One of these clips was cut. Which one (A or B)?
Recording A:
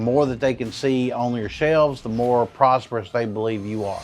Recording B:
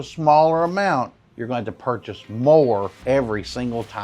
B